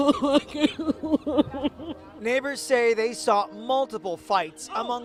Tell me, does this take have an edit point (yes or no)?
no